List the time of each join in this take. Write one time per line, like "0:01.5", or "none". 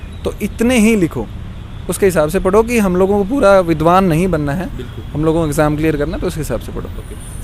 none

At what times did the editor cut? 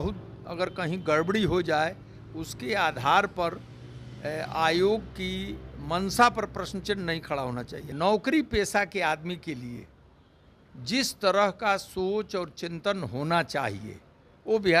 0:07.8

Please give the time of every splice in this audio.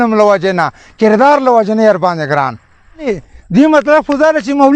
0:03.1

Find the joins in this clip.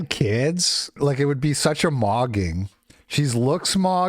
0:01.0

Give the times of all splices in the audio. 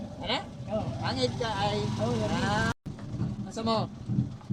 0:02.8

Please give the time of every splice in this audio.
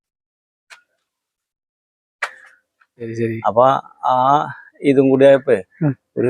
0:03.1

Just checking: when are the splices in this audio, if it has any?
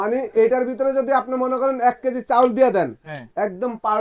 none

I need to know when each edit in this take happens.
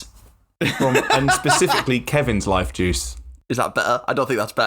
0:03.5

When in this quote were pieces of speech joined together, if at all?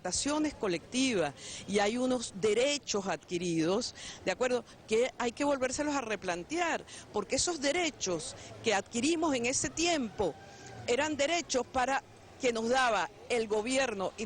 0:04.7

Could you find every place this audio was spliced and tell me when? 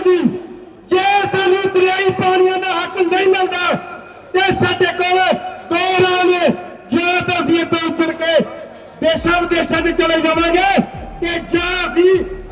none

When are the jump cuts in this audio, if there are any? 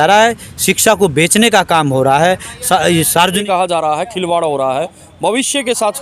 0:03.4

